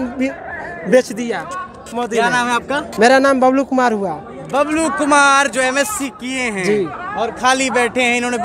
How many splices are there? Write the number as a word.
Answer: zero